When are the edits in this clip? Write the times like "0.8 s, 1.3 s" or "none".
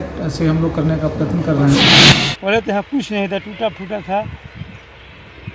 2.1 s